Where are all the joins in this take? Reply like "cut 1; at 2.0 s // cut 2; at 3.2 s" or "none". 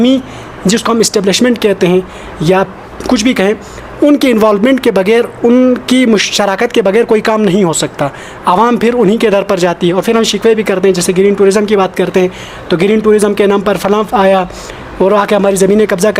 none